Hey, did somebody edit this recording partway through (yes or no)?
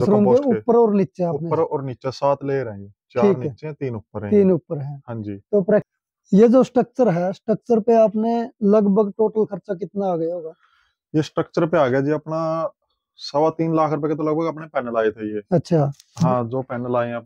yes